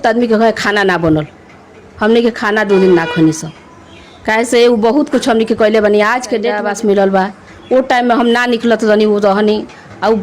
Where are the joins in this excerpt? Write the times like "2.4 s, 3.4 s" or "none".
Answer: 6.6 s